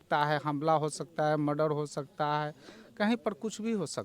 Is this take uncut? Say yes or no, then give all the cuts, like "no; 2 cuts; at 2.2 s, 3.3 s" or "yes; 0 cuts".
yes; 0 cuts